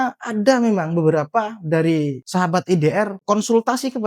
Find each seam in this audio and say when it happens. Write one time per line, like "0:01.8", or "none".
0:02.2
0:03.2